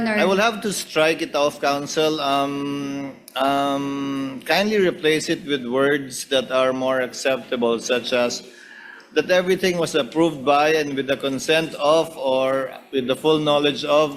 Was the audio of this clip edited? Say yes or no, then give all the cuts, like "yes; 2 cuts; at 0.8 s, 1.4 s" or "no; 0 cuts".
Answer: no; 0 cuts